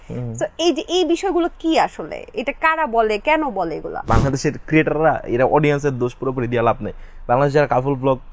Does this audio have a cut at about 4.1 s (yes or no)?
yes